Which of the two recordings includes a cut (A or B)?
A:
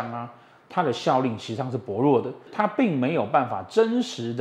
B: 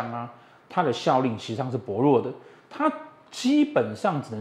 A